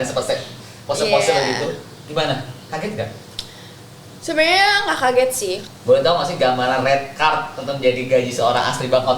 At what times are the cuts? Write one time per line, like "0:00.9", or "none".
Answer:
0:05.6